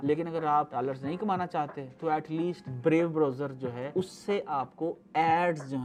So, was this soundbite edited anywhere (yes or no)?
no